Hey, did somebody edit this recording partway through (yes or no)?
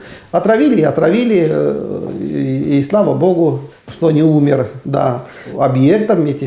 yes